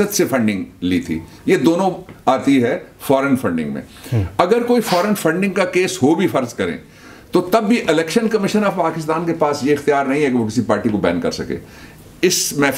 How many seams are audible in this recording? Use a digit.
0